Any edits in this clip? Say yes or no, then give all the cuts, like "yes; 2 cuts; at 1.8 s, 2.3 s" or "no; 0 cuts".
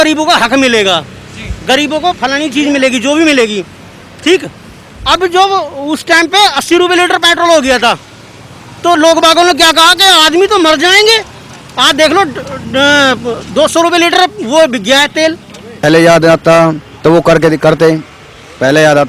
yes; 1 cut; at 15.8 s